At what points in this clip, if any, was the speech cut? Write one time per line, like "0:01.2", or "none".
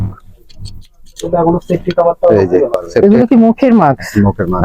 0:03.0

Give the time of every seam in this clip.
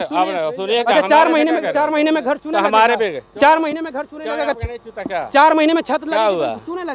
none

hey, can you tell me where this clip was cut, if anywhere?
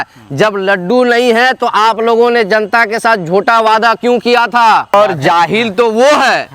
0:04.9

